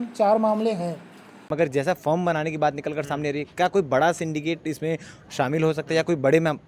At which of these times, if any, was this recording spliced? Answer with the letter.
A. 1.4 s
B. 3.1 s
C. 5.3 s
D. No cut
A